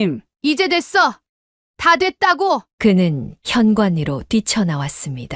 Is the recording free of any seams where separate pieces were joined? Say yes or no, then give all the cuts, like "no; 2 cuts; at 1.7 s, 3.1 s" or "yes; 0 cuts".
yes; 0 cuts